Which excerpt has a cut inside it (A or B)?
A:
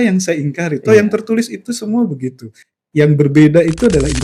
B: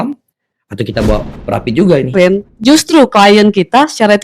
B